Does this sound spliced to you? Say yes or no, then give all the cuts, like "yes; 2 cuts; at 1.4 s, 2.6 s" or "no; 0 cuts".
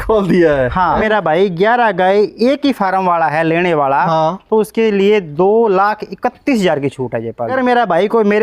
yes; 2 cuts; at 1.0 s, 7.5 s